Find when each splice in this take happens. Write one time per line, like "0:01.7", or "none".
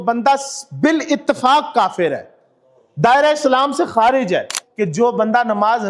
0:04.6